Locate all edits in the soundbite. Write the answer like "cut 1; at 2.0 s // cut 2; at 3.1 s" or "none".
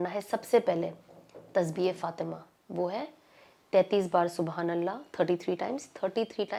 none